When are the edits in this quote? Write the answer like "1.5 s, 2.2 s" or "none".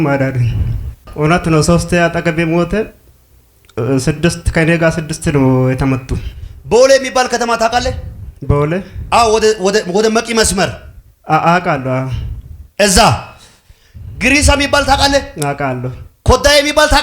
1.1 s